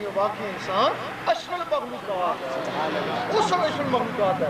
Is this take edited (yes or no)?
no